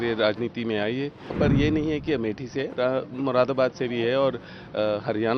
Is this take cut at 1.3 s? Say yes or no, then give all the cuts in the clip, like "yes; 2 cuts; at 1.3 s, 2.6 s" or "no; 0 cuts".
yes; 1 cut; at 1.3 s